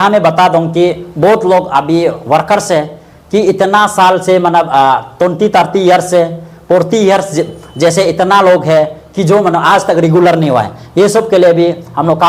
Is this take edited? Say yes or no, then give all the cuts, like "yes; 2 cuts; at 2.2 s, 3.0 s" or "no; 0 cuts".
no; 0 cuts